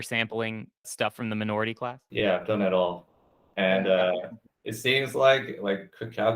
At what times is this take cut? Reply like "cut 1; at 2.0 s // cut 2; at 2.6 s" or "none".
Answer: cut 1; at 2.0 s